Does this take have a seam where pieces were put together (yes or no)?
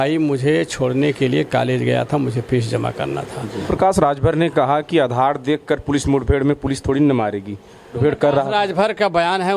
yes